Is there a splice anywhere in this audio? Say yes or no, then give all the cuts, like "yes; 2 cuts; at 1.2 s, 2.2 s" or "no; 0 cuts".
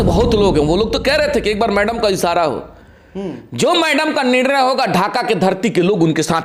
no; 0 cuts